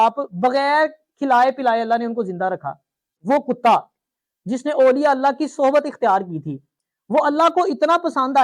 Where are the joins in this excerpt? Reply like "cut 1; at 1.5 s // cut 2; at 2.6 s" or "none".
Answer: cut 1; at 3.1 s